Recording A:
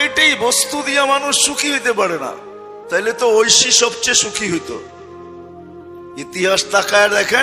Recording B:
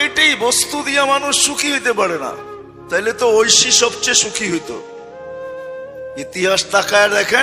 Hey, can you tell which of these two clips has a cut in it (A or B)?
A